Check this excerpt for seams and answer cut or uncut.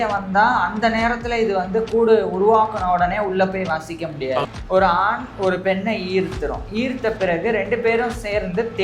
cut